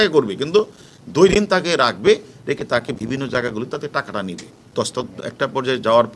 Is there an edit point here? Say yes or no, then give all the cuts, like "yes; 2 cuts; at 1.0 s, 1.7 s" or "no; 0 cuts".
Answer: yes; 1 cut; at 4.6 s